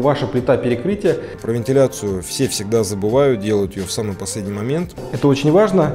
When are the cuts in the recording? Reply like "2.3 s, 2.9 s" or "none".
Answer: 1.4 s, 5.0 s